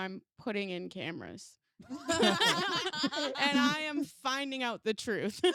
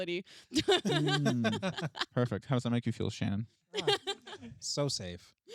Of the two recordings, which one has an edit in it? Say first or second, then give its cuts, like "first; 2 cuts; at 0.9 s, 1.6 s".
second; 1 cut; at 1.9 s